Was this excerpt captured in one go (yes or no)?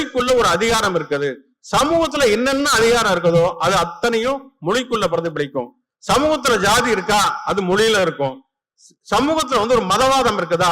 yes